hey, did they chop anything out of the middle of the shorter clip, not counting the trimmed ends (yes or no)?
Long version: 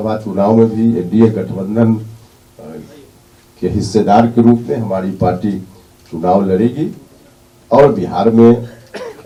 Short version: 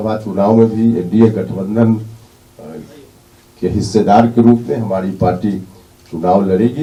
no